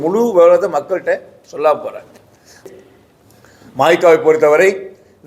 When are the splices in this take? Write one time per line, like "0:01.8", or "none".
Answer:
0:02.7